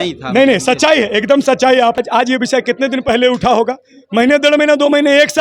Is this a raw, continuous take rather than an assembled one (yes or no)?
no